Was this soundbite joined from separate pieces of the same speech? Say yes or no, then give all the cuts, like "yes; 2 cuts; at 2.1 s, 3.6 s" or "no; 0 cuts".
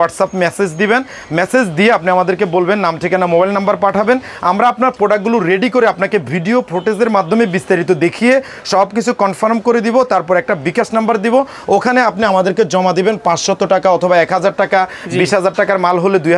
no; 0 cuts